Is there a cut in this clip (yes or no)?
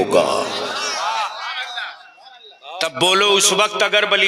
no